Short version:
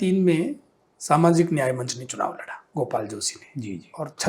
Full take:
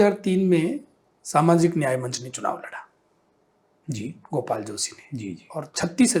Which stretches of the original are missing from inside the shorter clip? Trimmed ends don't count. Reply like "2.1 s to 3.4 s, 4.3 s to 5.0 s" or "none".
2.9 s to 4.2 s